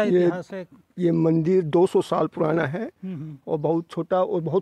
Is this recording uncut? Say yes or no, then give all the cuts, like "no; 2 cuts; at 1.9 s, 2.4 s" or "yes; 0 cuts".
yes; 0 cuts